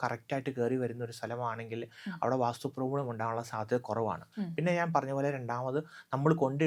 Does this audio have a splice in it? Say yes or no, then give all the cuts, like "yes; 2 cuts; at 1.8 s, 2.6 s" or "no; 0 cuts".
no; 0 cuts